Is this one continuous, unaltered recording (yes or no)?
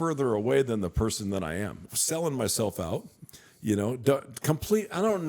no